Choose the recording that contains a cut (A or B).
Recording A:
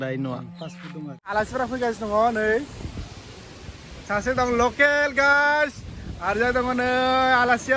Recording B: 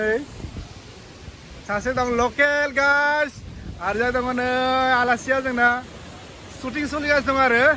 A